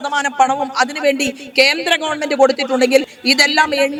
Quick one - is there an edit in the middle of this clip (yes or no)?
no